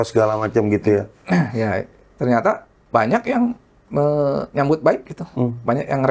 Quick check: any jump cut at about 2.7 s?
yes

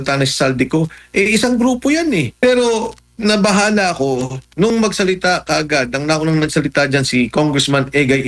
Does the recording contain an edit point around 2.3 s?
yes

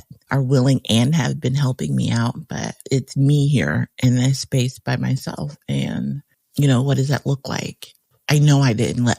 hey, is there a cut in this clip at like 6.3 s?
no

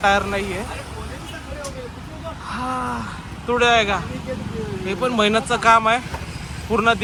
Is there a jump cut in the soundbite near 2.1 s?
no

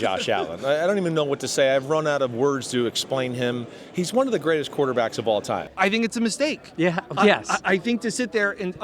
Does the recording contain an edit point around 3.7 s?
no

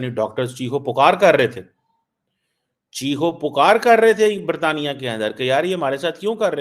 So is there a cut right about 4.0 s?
no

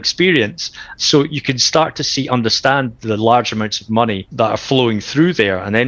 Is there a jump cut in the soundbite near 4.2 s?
yes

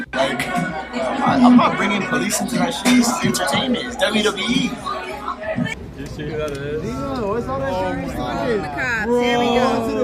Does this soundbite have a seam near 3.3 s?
no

